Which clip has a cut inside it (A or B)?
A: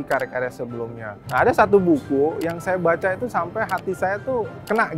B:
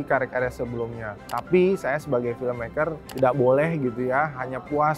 A